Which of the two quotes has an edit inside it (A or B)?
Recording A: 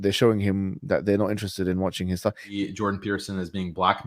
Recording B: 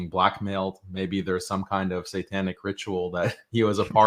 A